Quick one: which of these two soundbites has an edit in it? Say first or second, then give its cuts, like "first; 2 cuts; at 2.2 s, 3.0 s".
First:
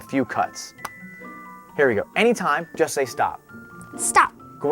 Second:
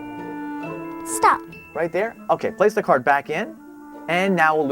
second; 1 cut; at 1.2 s